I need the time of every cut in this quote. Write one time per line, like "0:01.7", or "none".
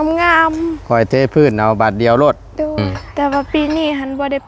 0:03.0